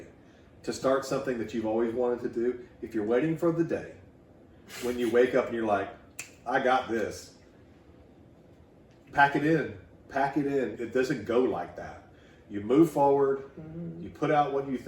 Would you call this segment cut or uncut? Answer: cut